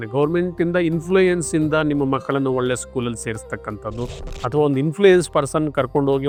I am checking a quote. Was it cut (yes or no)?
no